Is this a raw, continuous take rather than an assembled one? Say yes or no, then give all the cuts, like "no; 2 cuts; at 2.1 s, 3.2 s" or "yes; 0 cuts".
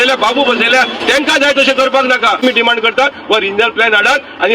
yes; 0 cuts